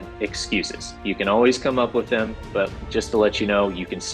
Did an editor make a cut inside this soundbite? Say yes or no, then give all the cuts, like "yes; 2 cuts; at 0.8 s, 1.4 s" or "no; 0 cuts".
yes; 1 cut; at 2.7 s